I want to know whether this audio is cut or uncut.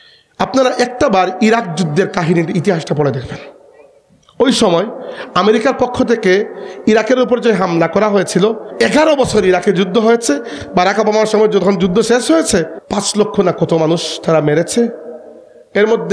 cut